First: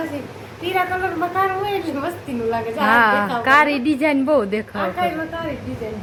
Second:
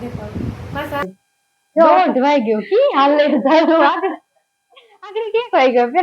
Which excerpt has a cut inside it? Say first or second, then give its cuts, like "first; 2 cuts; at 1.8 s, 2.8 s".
second; 1 cut; at 1.0 s